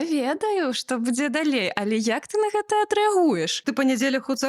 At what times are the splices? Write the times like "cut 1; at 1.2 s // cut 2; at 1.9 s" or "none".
cut 1; at 3.6 s